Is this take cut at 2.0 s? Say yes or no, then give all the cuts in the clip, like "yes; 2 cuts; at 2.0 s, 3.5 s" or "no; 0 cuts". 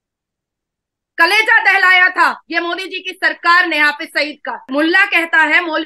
no; 1 cut; at 4.6 s